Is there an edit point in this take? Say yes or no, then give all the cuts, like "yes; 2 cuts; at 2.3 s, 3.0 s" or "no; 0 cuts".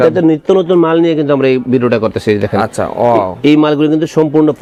no; 0 cuts